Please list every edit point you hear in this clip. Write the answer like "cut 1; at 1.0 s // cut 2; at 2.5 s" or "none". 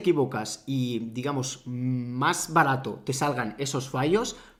none